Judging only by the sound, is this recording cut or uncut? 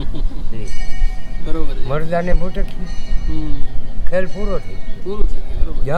uncut